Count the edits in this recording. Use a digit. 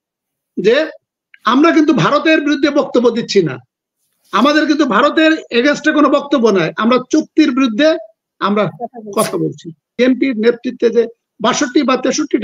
1